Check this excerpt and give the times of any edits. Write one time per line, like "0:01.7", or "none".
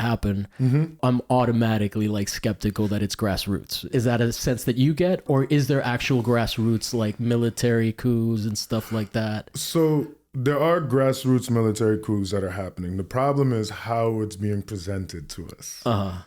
0:01.0
0:03.9
0:05.2

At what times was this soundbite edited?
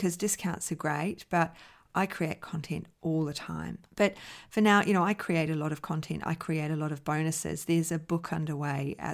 0:03.8

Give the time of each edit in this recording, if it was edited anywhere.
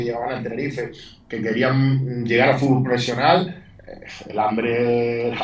none

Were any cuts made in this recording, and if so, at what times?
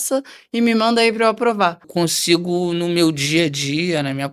0:01.9

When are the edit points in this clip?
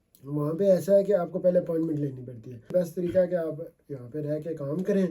0:02.7

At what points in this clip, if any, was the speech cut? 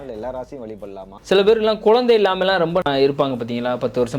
0:01.2
0:02.8

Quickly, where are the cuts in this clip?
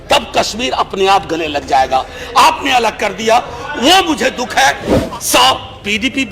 0:04.9

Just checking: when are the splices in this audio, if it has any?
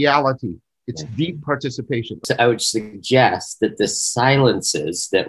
0:02.2

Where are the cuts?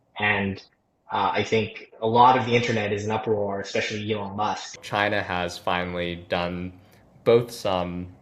0:04.8

